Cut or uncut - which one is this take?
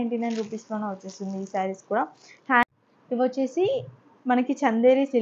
cut